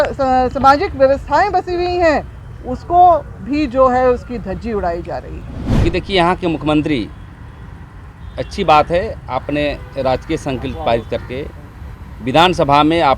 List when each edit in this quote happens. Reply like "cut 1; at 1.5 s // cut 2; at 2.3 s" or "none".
cut 1; at 5.6 s